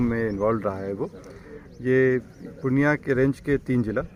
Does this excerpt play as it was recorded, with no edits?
yes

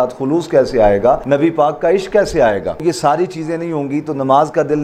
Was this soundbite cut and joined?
yes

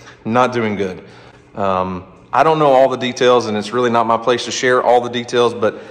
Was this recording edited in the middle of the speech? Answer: no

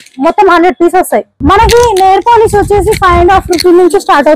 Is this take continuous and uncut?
no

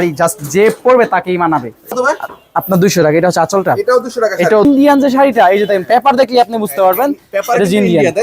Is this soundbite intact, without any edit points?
no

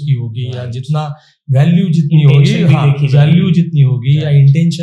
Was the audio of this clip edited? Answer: no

